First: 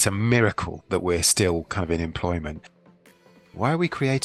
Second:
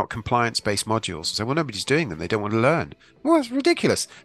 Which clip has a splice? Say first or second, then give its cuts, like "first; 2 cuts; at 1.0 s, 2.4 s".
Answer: first; 1 cut; at 3.0 s